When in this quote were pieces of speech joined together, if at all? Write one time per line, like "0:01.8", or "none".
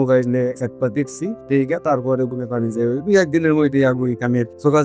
none